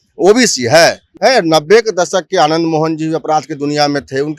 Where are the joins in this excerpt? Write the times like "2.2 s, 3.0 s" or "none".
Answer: 1.1 s